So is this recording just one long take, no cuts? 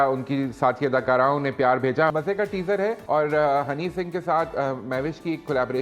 no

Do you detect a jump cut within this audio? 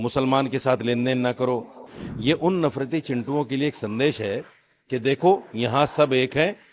yes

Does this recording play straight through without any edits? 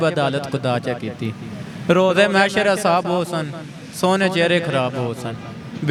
yes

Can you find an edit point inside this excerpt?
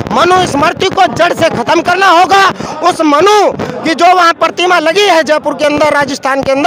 no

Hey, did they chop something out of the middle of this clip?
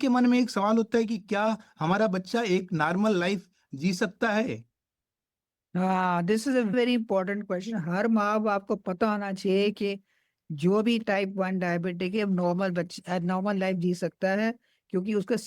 no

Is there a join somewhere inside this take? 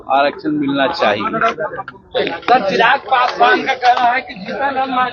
no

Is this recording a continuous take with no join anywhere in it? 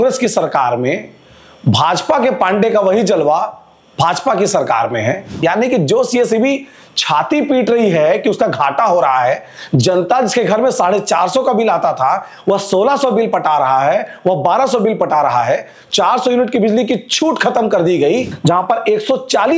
no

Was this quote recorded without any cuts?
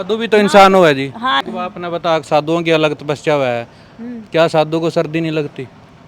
no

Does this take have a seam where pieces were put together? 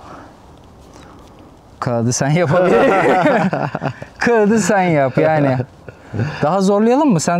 no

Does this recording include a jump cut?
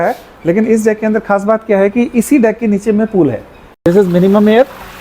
yes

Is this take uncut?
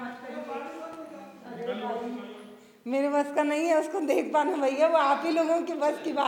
yes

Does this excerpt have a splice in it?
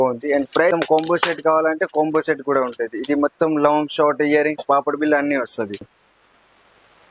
yes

